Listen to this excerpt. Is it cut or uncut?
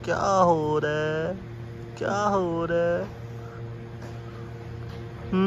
uncut